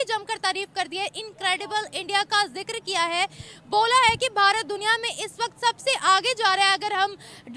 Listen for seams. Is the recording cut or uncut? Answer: uncut